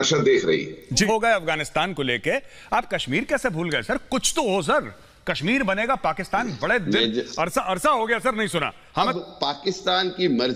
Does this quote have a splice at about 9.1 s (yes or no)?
yes